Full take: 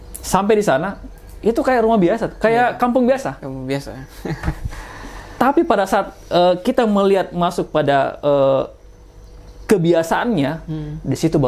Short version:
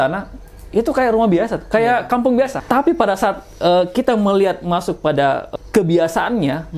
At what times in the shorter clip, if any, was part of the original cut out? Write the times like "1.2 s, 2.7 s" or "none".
2.6 s, 5.4 s